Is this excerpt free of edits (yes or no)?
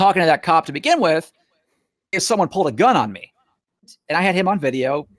no